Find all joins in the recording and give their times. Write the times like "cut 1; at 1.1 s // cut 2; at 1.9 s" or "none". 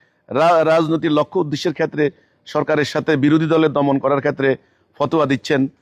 none